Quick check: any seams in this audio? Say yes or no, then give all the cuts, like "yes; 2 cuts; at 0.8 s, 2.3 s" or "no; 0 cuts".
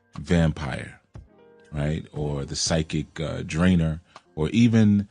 yes; 1 cut; at 3.8 s